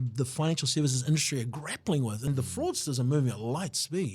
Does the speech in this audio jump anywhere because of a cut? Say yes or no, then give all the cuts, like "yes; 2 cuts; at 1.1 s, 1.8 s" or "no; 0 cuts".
yes; 1 cut; at 2.3 s